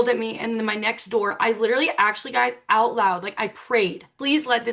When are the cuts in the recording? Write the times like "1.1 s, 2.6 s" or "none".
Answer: none

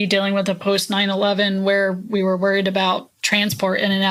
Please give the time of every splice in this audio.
none

